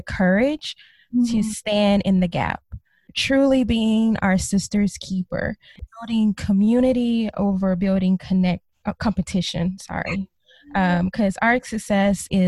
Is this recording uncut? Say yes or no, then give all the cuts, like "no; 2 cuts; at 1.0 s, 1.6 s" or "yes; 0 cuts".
no; 2 cuts; at 3.0 s, 5.7 s